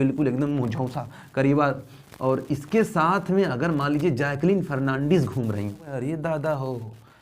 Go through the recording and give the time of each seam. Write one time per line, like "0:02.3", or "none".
0:05.9